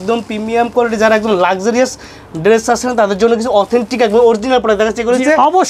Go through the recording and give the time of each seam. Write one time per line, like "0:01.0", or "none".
none

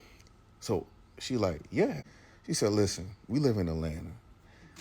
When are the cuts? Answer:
0:02.1

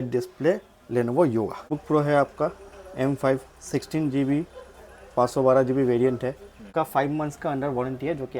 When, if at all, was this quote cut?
0:01.7
0:06.7

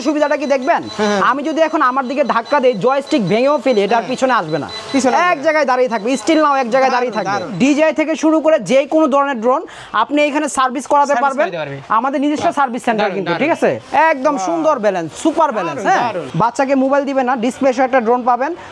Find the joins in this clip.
0:07.5
0:13.8
0:16.2

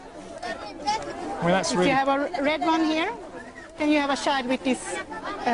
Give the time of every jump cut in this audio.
0:04.6

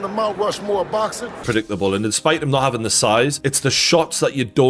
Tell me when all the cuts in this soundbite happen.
0:01.4

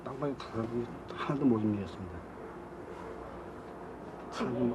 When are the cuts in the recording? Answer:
0:01.3

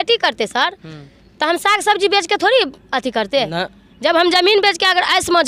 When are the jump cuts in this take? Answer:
none

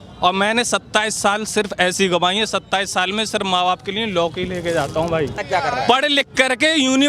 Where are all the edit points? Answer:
0:05.4

